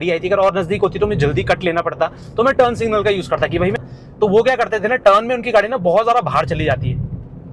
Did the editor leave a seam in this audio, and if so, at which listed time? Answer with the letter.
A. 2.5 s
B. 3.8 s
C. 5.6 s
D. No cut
B